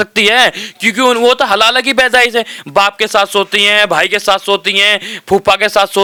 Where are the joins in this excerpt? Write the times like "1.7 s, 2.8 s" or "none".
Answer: none